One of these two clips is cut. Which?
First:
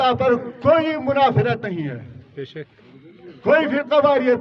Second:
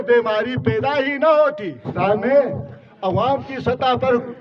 second; 1 cut; at 1.9 s

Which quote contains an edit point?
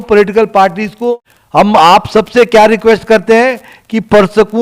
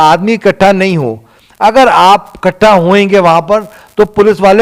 first; 1 cut; at 1.1 s

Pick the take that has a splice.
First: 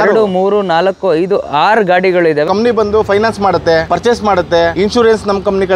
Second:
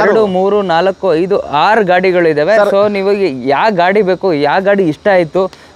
first; 3 cuts; at 2.5 s, 3.9 s, 4.7 s

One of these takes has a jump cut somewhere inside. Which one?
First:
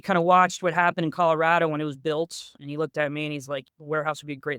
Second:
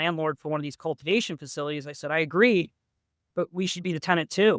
first; 2 cuts; at 2.5 s, 3.7 s

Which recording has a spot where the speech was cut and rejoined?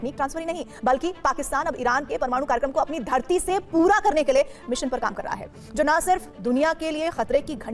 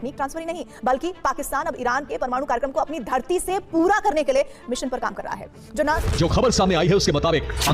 second; 1 cut; at 6.0 s

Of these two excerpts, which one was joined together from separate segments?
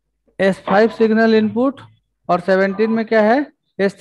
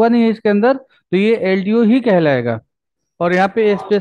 second; 1 cut; at 3.0 s

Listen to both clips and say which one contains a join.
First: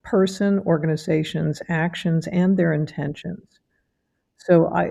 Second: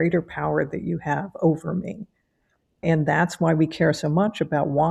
second; 1 cut; at 2.8 s

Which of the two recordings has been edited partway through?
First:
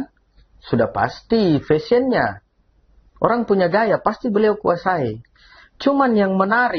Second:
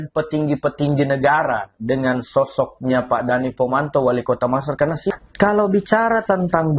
second; 1 cut; at 5.1 s

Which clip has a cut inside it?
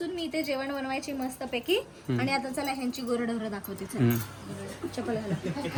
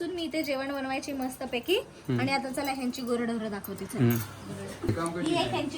second; 1 cut; at 4.8 s

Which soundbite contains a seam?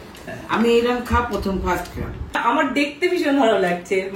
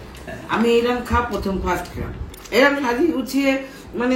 first; 1 cut; at 2.2 s

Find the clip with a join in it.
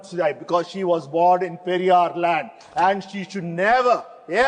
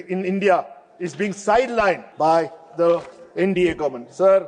second; 1 cut; at 2.1 s

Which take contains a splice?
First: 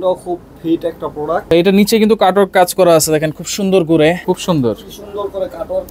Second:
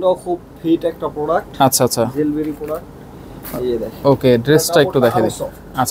first; 2 cuts; at 1.5 s, 4.2 s

